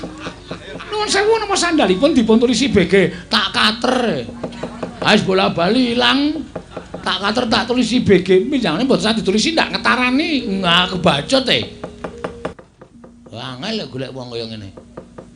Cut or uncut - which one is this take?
cut